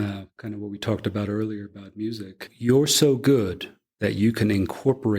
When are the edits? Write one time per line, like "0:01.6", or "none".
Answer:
0:02.4